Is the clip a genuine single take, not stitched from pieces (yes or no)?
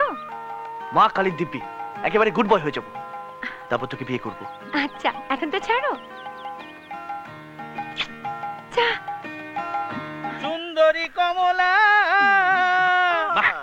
yes